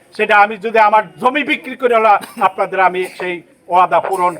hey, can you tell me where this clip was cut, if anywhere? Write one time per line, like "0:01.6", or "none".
none